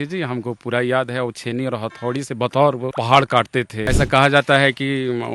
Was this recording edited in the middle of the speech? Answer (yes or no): yes